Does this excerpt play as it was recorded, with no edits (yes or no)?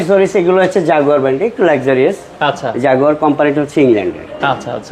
yes